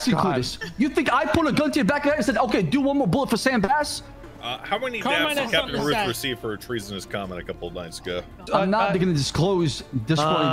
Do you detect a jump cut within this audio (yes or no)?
yes